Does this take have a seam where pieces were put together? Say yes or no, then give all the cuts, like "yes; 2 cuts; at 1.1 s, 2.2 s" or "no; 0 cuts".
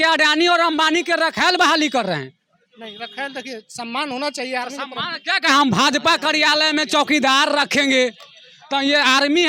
no; 0 cuts